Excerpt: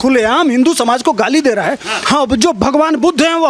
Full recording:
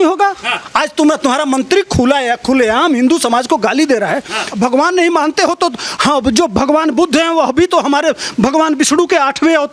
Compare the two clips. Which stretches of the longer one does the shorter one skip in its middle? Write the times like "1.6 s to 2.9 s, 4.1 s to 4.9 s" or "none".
4.4 s to 5.9 s